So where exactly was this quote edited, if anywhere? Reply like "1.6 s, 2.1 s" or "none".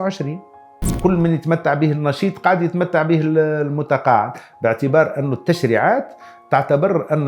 1.0 s